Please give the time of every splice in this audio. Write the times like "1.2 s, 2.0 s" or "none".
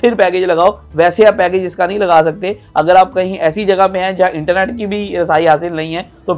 none